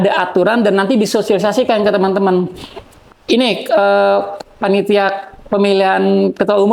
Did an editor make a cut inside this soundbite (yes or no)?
no